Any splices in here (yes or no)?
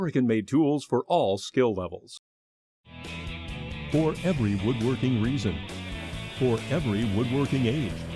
no